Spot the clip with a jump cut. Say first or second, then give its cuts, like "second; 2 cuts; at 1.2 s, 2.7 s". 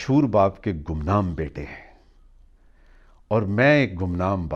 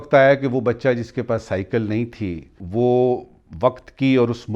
second; 1 cut; at 2.5 s